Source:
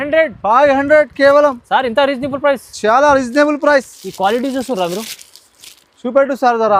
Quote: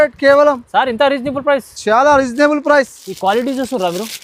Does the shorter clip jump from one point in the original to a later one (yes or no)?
no